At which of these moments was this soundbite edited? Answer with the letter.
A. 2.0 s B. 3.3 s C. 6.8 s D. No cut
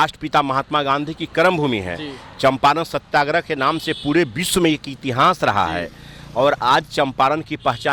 D